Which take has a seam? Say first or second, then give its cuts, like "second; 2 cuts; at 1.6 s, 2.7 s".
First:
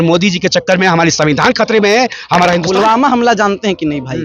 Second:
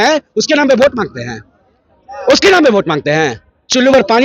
first; 1 cut; at 2.6 s